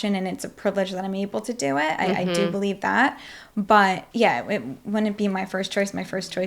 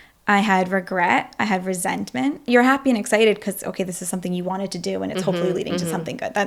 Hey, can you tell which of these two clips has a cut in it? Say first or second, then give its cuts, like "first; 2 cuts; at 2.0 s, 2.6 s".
first; 1 cut; at 4.0 s